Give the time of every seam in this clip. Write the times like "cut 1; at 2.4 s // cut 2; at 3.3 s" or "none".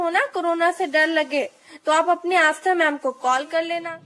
none